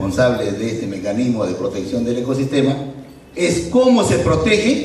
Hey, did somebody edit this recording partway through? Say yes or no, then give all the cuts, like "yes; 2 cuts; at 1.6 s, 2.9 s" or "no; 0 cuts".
yes; 1 cut; at 3.3 s